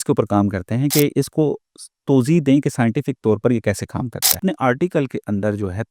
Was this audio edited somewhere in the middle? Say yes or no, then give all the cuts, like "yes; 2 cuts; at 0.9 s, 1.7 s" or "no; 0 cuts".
yes; 1 cut; at 4.4 s